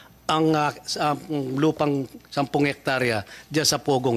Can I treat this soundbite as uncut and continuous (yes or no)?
yes